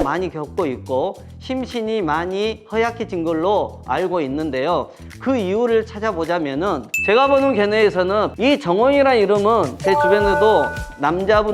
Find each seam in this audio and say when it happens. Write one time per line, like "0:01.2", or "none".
0:06.9